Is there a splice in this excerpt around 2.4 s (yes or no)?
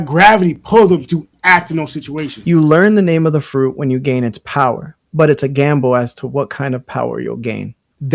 yes